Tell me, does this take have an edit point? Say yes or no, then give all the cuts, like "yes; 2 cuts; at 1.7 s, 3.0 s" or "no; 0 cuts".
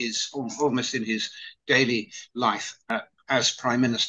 yes; 1 cut; at 2.9 s